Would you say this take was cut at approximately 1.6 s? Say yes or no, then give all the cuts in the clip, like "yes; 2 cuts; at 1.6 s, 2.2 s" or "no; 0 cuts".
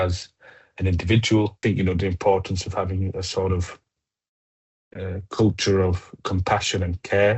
yes; 1 cut; at 1.6 s